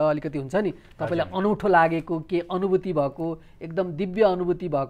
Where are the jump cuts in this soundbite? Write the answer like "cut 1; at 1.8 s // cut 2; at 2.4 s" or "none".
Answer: none